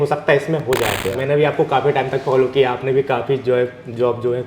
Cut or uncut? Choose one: cut